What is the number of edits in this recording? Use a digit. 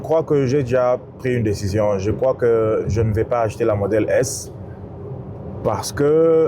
0